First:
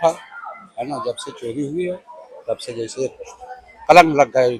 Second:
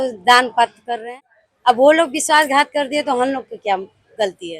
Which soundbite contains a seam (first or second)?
second